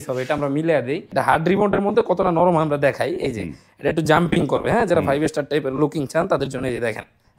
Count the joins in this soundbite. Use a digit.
1